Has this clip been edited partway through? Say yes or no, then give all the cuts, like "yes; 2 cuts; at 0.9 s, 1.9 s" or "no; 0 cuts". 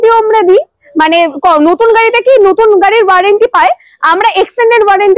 no; 0 cuts